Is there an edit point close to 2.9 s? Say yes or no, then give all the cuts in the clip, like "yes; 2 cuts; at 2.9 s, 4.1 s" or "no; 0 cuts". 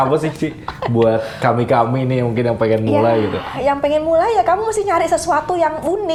no; 0 cuts